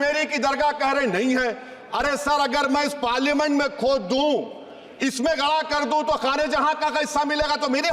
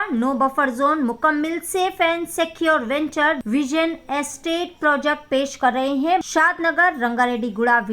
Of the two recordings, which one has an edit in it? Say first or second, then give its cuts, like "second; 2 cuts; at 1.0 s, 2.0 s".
second; 2 cuts; at 3.4 s, 6.2 s